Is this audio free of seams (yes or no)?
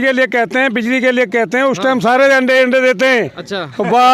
yes